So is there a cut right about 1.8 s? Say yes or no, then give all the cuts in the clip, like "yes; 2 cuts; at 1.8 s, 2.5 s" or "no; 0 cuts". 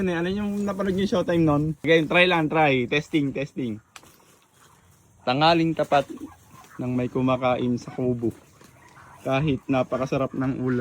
yes; 1 cut; at 1.8 s